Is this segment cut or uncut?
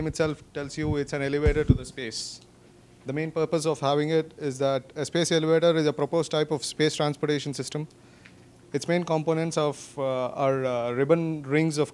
cut